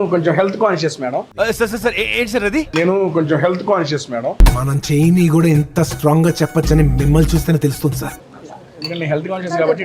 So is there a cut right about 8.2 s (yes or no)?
yes